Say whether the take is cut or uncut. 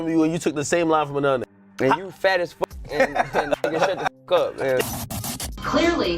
cut